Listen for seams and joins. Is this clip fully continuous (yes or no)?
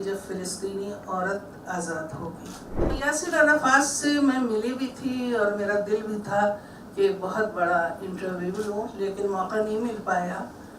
no